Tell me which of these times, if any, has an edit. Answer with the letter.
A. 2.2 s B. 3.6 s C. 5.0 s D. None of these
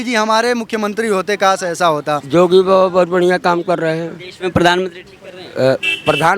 A